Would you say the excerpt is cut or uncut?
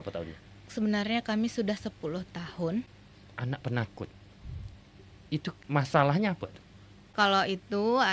cut